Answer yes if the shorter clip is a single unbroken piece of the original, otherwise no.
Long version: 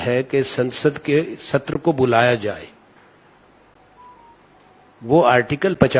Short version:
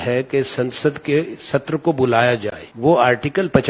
no